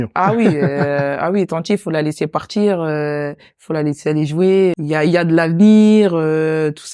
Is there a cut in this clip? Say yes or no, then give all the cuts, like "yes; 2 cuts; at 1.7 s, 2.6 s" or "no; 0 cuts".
yes; 1 cut; at 4.8 s